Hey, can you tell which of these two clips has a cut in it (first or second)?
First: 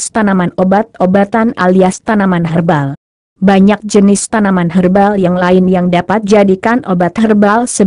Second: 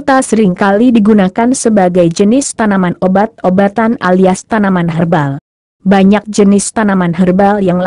first